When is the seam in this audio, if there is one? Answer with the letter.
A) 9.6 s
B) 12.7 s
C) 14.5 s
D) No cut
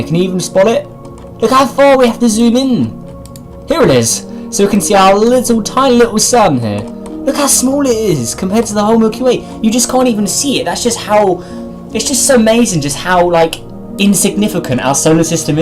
C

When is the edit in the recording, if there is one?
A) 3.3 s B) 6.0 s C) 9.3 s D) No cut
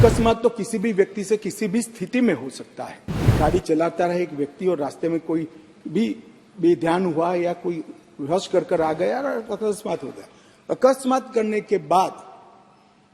A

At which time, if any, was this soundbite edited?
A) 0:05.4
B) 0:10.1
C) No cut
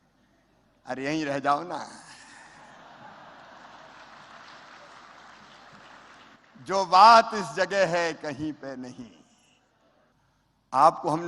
B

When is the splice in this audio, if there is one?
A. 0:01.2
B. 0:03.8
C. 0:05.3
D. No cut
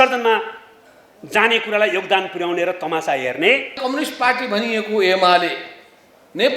B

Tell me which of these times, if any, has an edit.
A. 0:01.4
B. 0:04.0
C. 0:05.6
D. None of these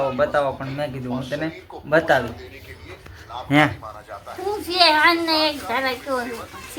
D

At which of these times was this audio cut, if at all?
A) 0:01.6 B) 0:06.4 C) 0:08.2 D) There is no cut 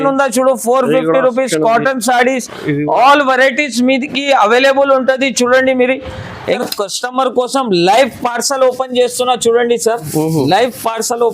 B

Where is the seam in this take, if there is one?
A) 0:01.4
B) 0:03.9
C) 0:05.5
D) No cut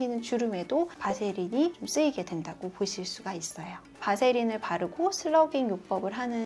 B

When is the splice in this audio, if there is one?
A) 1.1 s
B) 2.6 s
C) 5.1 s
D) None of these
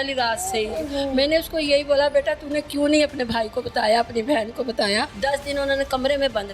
C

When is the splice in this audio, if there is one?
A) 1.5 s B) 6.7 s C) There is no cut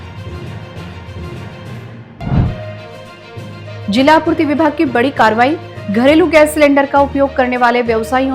A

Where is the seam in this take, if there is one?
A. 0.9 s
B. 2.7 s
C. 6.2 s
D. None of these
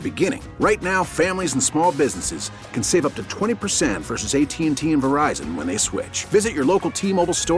D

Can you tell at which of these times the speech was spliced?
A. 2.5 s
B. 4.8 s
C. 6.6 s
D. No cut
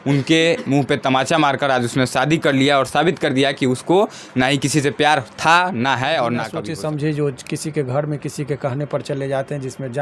C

